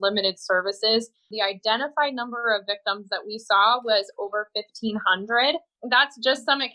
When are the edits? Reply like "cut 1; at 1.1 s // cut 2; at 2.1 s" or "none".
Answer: cut 1; at 5.7 s